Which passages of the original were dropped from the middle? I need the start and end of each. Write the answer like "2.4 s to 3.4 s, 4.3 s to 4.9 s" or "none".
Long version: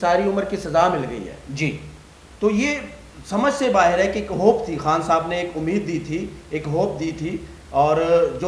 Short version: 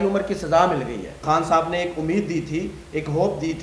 1.4 s to 4.8 s

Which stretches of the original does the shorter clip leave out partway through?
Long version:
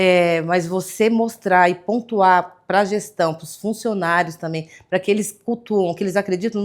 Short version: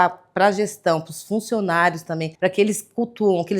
4.6 s to 4.8 s

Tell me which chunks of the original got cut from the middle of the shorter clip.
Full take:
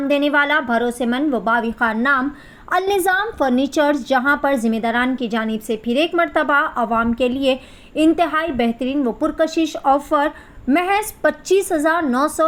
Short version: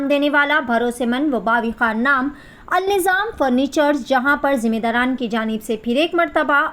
none

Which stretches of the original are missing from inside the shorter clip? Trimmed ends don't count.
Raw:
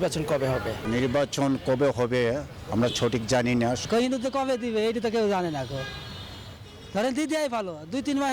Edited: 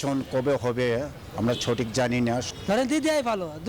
3.8 s to 6.7 s

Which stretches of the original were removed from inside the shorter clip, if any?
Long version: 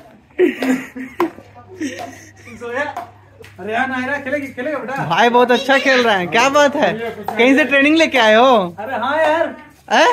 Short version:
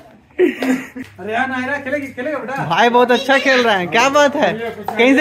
1.0 s to 3.4 s

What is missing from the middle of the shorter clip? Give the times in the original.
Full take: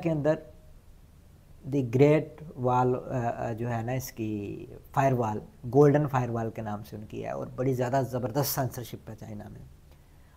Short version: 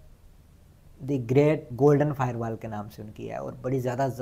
2.3 s to 5.6 s

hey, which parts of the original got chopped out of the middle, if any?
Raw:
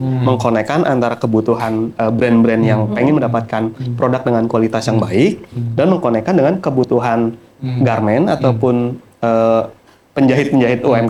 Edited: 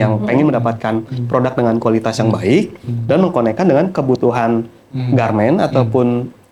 none

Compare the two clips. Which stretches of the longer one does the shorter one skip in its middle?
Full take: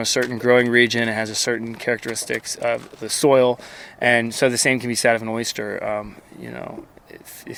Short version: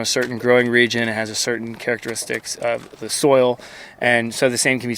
none

